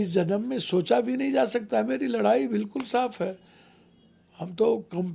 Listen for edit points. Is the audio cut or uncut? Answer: uncut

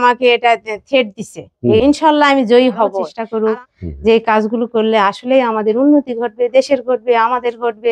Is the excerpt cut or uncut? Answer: cut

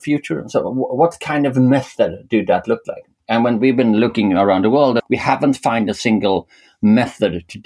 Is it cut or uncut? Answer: cut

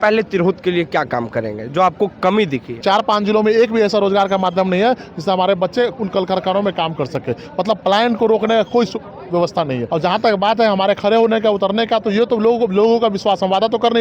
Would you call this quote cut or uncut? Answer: cut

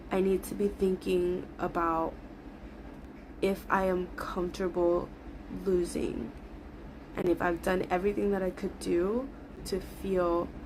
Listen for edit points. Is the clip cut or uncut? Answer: cut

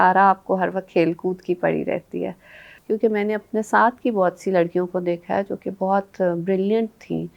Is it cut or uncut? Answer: cut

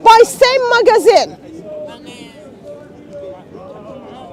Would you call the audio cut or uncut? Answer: uncut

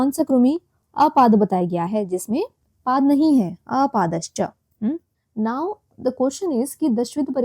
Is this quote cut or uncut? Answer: cut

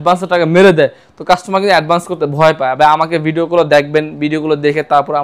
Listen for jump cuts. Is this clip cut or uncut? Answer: uncut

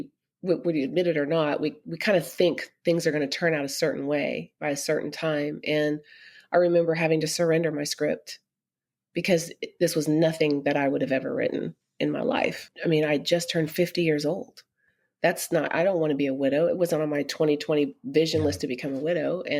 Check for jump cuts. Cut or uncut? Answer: cut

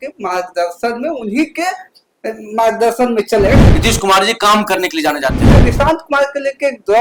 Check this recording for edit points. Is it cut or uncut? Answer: cut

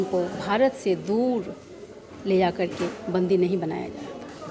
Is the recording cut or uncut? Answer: uncut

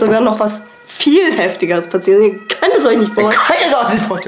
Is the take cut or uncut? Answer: uncut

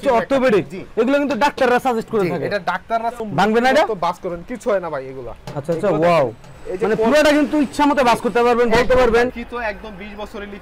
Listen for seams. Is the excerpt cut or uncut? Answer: cut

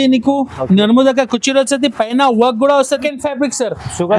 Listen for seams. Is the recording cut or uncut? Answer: cut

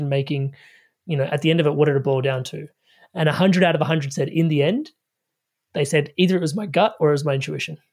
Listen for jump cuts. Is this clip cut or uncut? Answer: uncut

